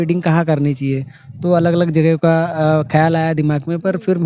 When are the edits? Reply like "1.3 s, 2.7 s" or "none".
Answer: none